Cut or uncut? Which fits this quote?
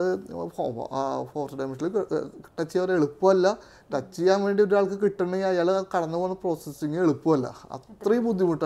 uncut